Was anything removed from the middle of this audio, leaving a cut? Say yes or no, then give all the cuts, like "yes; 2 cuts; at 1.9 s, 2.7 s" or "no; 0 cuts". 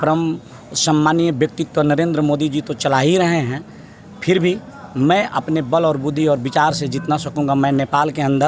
no; 0 cuts